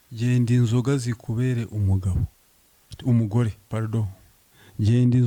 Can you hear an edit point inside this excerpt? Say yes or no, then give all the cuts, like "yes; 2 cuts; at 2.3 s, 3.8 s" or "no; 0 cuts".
no; 0 cuts